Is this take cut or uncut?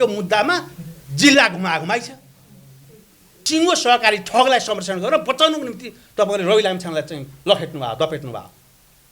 cut